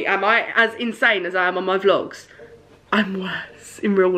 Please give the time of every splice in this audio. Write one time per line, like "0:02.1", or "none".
none